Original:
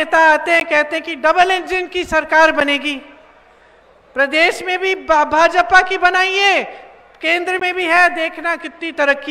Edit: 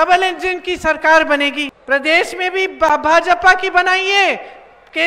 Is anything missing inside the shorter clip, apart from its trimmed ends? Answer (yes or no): yes